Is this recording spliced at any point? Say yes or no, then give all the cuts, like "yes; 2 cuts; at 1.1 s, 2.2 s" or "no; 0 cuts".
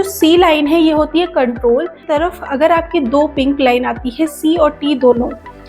yes; 1 cut; at 2.1 s